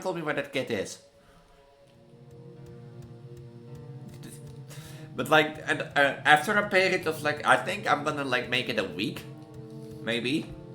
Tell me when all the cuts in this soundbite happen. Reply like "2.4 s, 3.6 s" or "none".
2.2 s